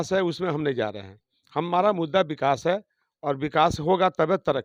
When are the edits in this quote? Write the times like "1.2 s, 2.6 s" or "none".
none

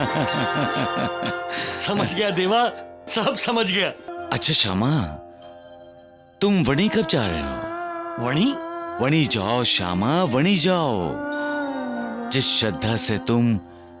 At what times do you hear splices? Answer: 4.0 s

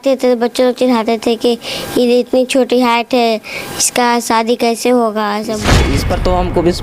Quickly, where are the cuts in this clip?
5.8 s

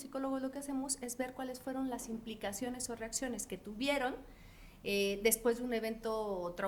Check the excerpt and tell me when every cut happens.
none

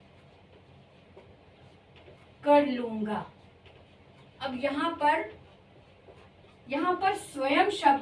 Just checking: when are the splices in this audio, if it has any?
none

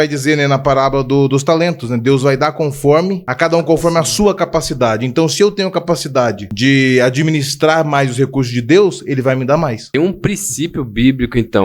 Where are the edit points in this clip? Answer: 3.2 s, 6.5 s, 9.8 s

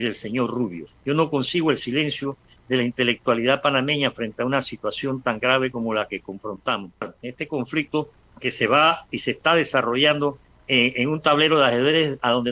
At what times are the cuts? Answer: 7.1 s

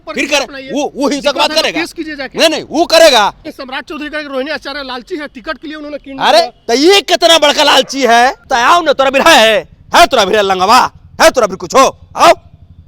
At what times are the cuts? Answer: 3.5 s, 8.5 s

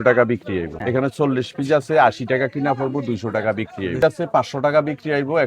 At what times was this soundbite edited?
1.2 s, 4.0 s

